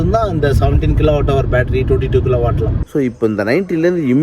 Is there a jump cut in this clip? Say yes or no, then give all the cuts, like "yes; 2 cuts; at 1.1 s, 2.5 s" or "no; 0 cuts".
yes; 1 cut; at 2.8 s